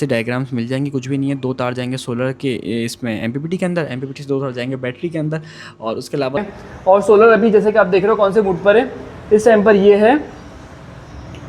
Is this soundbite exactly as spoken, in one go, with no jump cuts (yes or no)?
no